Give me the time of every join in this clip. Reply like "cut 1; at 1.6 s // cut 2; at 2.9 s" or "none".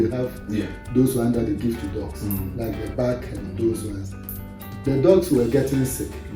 none

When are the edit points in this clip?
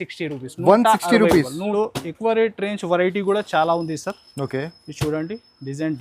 cut 1; at 1.7 s

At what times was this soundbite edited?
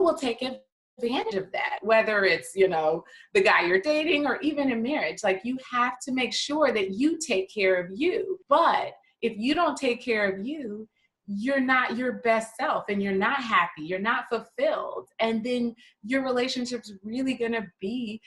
cut 1; at 8.4 s

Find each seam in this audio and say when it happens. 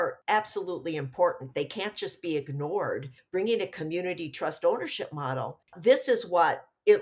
cut 1; at 3.1 s // cut 2; at 5.6 s

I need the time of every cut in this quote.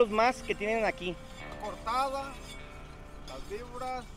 cut 1; at 1.5 s

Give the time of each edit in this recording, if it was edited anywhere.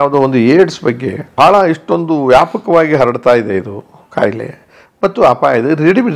cut 1; at 1.2 s

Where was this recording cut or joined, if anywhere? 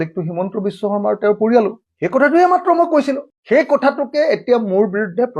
cut 1; at 3.3 s

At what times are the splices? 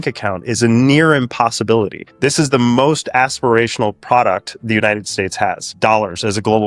cut 1; at 5.7 s

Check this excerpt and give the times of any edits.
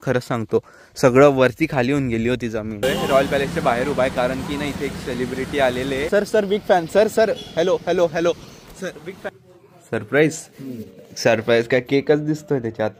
cut 1; at 2.8 s // cut 2; at 6.0 s // cut 3; at 9.3 s

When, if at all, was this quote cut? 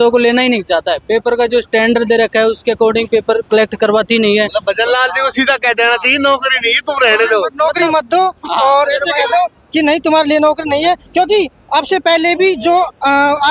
none

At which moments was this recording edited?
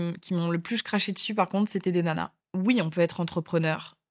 cut 1; at 2.4 s

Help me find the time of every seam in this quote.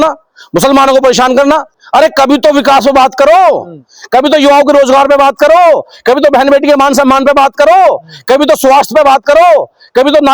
cut 1; at 1.8 s

